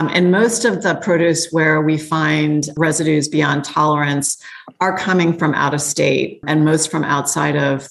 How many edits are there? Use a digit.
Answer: 2